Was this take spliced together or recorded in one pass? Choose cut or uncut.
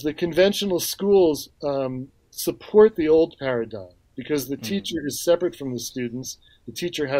uncut